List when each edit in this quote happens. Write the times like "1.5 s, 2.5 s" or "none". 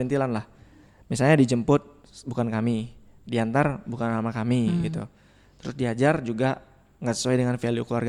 none